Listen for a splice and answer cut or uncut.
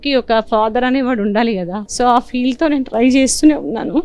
cut